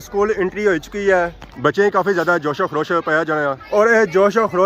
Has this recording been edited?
no; 0 cuts

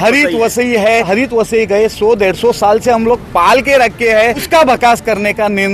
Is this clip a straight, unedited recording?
no; 2 cuts; at 1.1 s, 4.4 s

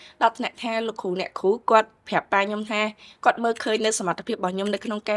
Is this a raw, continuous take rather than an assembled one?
yes; 0 cuts

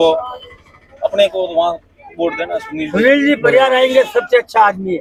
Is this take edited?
no; 0 cuts

